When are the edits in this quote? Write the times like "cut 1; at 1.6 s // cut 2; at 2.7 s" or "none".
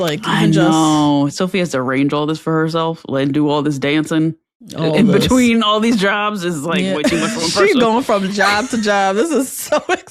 cut 1; at 1.3 s